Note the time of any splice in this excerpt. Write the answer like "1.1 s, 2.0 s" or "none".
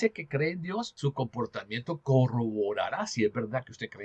0.9 s

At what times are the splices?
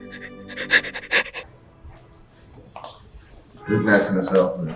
1.5 s

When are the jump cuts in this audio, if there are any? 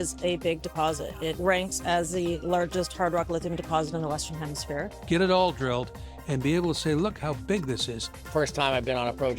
5.0 s, 8.1 s

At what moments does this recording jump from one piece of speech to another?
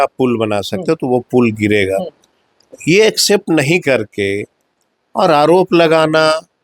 none

